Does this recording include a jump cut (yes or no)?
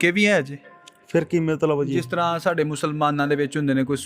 no